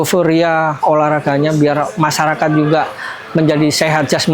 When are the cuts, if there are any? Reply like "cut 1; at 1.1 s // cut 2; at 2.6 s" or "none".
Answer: none

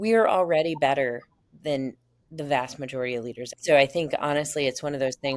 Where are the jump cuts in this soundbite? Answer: cut 1; at 3.6 s

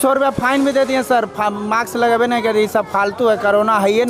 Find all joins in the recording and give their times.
none

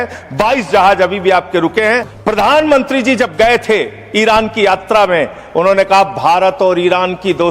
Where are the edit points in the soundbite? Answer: cut 1; at 2.1 s

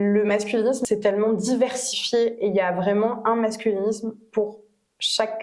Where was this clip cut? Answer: none

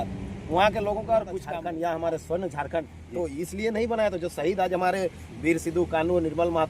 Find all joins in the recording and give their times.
cut 1; at 1.4 s

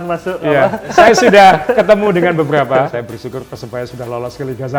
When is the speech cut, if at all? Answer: cut 1; at 0.9 s // cut 2; at 2.9 s

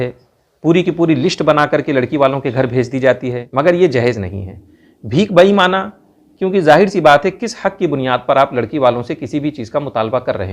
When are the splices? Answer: cut 1; at 3.4 s

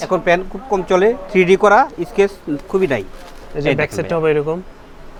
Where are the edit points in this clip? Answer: none

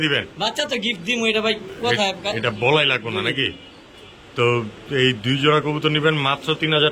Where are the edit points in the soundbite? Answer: none

